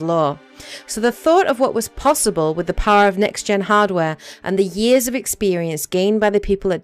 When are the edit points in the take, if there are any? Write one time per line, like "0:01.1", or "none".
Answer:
0:04.2